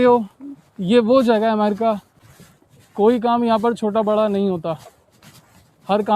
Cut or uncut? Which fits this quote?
cut